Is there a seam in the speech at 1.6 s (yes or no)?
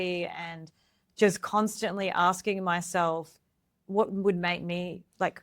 no